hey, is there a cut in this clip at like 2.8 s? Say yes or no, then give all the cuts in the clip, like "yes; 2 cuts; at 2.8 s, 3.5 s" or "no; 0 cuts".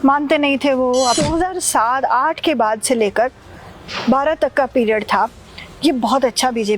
no; 1 cut; at 1.2 s